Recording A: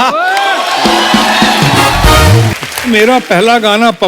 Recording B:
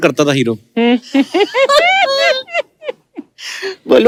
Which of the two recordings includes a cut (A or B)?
A